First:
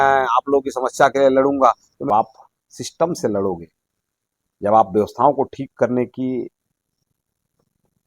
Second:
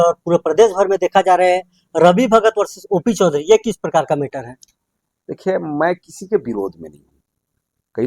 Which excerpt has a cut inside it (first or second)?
first